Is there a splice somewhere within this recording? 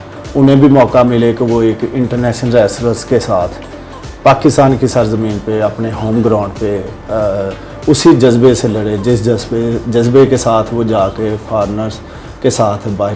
no; 0 cuts

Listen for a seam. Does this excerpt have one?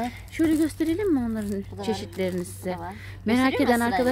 no; 0 cuts

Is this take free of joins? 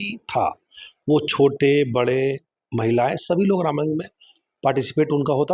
yes; 0 cuts

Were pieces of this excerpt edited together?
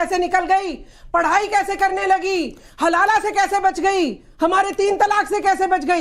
no; 0 cuts

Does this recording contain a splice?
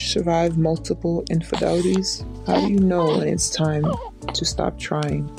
no; 0 cuts

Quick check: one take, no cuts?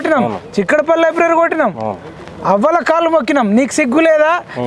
yes; 0 cuts

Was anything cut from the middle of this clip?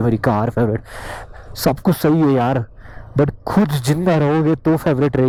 no; 0 cuts

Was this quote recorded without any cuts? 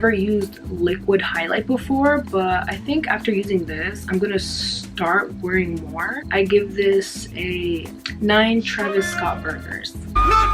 no; 2 cuts; at 6.2 s, 8.0 s

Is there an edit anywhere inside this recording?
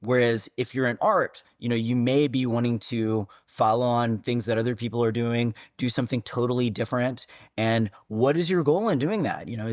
no; 0 cuts

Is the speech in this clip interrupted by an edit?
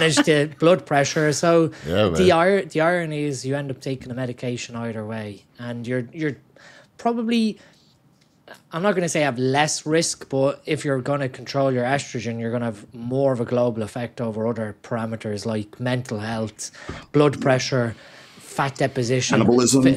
no; 0 cuts

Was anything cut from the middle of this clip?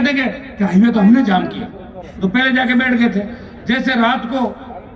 no; 0 cuts

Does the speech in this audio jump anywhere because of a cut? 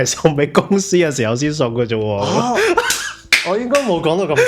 no; 0 cuts

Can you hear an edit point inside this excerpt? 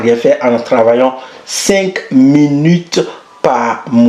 no; 0 cuts

